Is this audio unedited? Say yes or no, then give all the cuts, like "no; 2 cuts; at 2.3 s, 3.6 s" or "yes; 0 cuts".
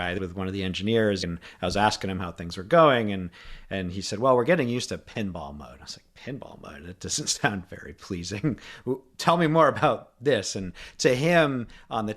no; 1 cut; at 1.2 s